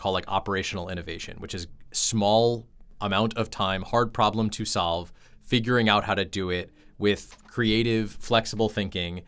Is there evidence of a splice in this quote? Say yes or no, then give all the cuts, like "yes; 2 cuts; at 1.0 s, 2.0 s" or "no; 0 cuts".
no; 0 cuts